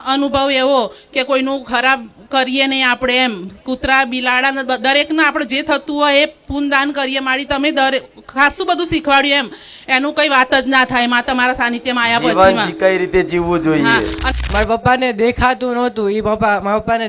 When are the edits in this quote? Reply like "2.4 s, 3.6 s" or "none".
14.3 s

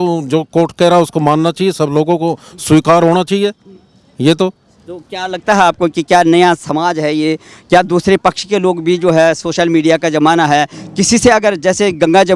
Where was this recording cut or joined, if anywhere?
none

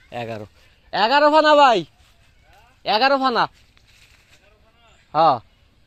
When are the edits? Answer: none

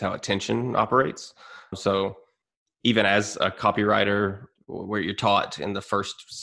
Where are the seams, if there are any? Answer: none

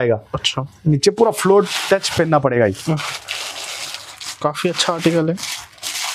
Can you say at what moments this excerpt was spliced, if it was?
none

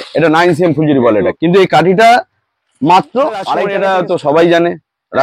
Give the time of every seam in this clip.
1.4 s, 3.6 s

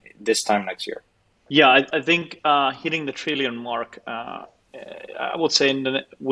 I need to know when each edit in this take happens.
none

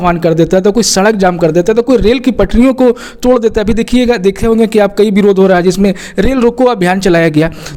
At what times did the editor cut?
none

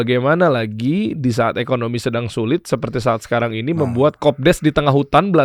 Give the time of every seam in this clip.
none

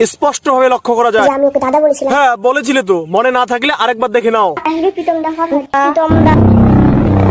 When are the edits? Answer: 1.2 s, 5.9 s

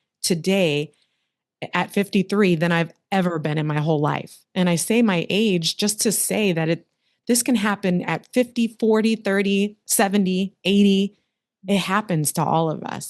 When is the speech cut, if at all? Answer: none

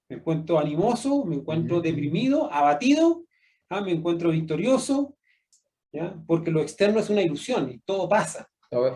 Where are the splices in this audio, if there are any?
5.5 s

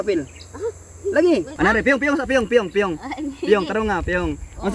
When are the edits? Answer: 1.5 s

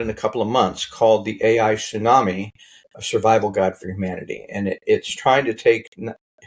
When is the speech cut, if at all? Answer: none

